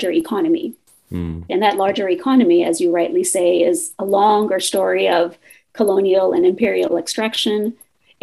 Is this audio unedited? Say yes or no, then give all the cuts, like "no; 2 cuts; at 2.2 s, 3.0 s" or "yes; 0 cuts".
no; 1 cut; at 1.5 s